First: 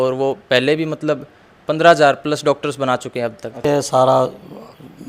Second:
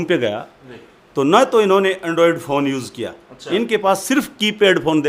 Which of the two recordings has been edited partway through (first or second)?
first